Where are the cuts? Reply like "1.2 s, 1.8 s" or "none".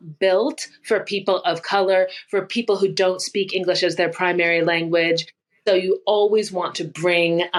none